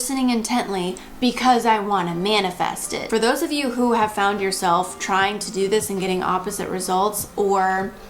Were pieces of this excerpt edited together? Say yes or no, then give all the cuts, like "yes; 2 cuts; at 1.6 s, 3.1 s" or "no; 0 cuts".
yes; 1 cut; at 3.0 s